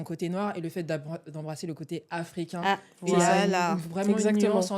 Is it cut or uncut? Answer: uncut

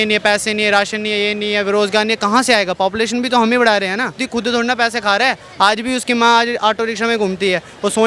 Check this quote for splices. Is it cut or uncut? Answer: cut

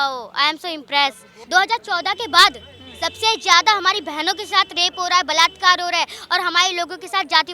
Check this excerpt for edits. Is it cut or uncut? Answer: cut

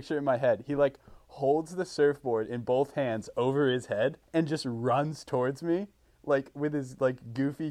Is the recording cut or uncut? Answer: cut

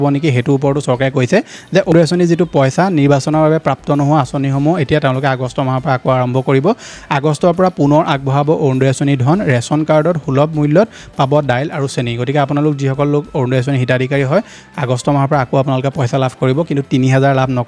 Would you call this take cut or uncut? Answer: uncut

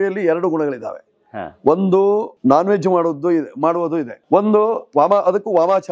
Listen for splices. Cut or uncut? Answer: cut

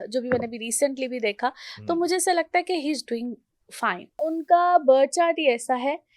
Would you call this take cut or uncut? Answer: cut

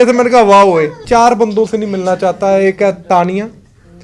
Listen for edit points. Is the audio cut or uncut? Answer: cut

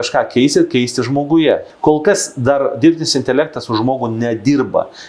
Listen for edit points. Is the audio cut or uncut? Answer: cut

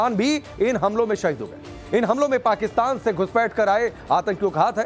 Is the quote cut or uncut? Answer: cut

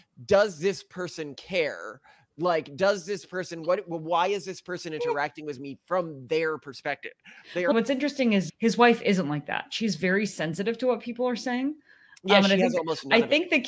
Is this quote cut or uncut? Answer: cut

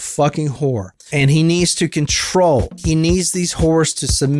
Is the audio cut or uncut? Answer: cut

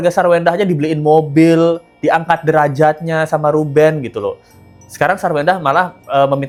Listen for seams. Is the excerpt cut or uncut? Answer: uncut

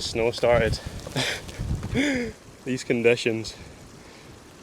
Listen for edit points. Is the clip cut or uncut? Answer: cut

